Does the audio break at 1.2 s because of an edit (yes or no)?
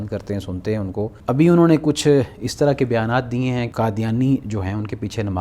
yes